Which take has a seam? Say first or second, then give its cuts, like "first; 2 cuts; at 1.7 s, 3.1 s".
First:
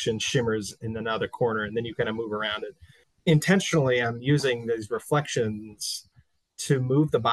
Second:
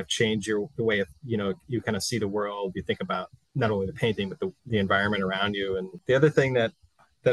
second; 3 cuts; at 3.4 s, 4.6 s, 6.0 s